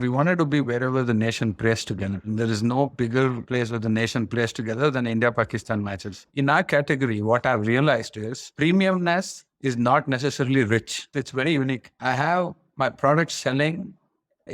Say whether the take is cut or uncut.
cut